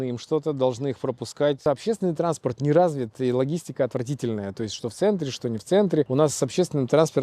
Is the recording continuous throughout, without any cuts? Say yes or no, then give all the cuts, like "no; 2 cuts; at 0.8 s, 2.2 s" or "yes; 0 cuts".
no; 2 cuts; at 1.6 s, 6.1 s